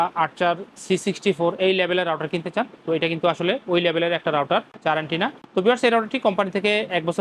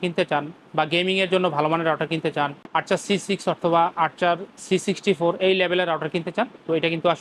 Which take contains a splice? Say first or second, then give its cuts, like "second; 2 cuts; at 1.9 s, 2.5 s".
first; 1 cut; at 5.4 s